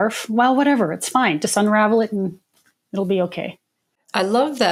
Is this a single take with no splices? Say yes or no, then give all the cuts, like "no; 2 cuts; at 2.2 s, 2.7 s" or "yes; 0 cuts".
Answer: yes; 0 cuts